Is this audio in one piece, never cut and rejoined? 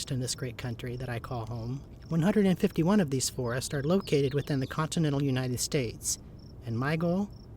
no; 1 cut; at 1.9 s

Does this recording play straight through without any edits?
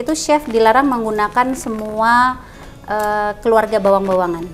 yes; 0 cuts

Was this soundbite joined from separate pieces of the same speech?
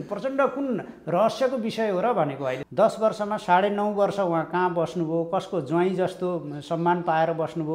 yes; 1 cut; at 2.6 s

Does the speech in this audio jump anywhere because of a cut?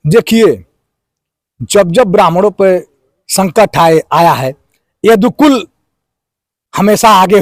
no; 0 cuts

